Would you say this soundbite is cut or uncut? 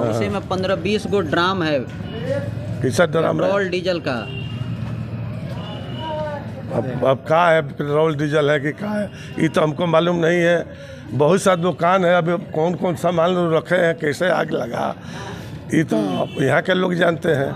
uncut